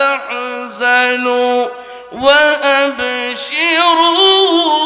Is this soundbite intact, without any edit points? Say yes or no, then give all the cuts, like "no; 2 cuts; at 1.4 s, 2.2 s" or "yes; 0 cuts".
yes; 0 cuts